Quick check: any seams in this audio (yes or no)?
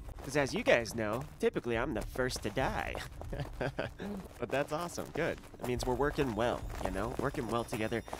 no